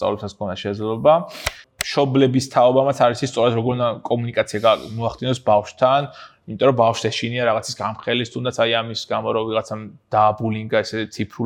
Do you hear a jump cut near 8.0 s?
no; 1 cut; at 1.6 s

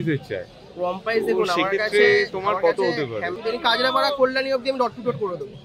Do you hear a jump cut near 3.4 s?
yes; 1 cut; at 3.4 s

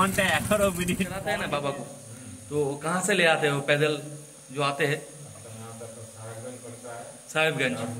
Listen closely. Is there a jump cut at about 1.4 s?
yes; 1 cut; at 1.4 s

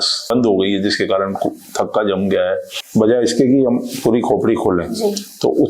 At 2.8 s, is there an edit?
yes; 1 cut; at 2.8 s

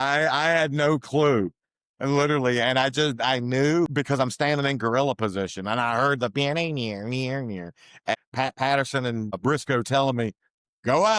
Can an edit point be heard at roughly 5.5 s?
no; 3 cuts; at 3.9 s, 8.1 s, 9.4 s

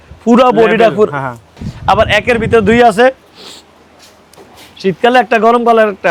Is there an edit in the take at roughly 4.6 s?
no; 1 cut; at 1.7 s

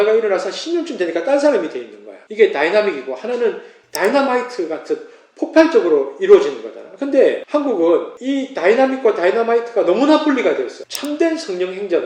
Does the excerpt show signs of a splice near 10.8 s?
yes; 1 cut; at 10.8 s

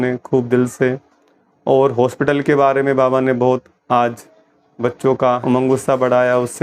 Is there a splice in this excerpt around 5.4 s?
yes; 1 cut; at 5.4 s

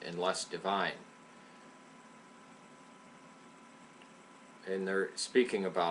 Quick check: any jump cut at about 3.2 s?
yes; 1 cut; at 3.2 s

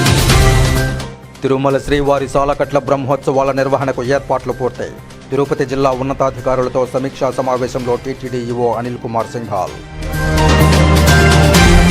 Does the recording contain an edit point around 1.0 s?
yes; 1 cut; at 1.0 s

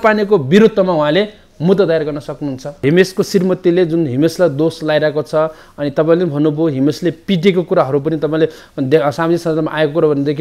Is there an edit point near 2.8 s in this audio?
yes; 1 cut; at 2.8 s

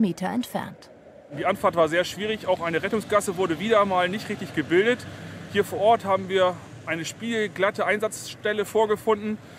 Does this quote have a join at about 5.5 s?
no; 1 cut; at 1.1 s

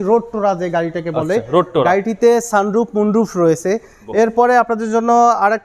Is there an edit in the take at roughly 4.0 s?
yes; 1 cut; at 4.0 s

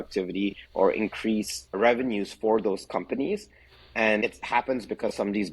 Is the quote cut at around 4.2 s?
yes; 1 cut; at 4.2 s

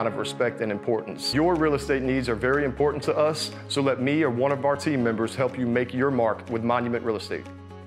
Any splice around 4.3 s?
no; 1 cut; at 1.2 s

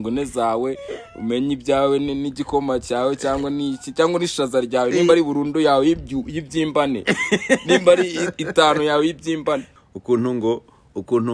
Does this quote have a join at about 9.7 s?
yes; 1 cut; at 9.7 s

